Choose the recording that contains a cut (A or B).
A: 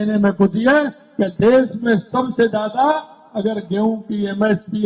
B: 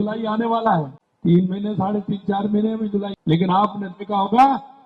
B